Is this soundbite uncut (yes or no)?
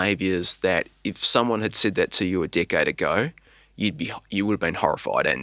yes